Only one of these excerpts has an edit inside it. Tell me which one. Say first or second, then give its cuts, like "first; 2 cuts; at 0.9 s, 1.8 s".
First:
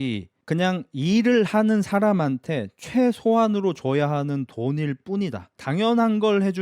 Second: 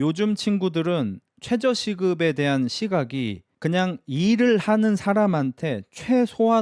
first; 1 cut; at 5.6 s